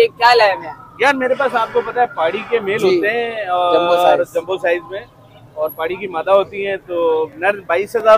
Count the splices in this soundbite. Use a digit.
0